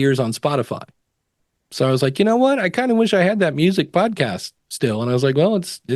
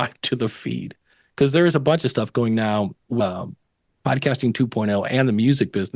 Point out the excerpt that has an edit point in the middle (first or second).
second